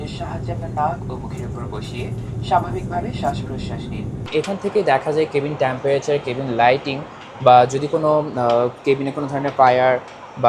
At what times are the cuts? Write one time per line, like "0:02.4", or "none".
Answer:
0:04.3

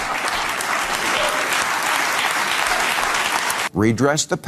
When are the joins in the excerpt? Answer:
0:03.6

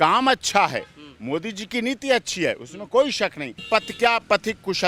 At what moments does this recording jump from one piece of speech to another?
0:03.6

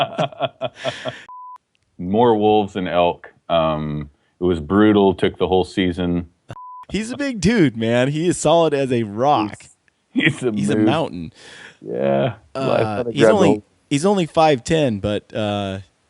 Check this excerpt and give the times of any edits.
0:01.2
0:06.5

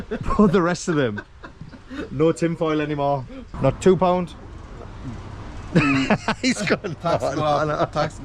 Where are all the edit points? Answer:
0:03.4

